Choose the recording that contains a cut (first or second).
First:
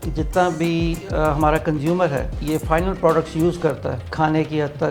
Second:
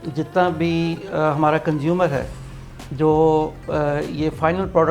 first